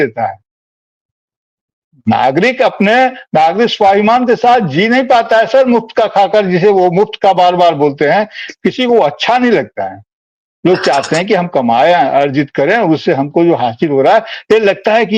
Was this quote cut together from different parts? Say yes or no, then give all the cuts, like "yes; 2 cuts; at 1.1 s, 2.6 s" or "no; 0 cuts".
no; 0 cuts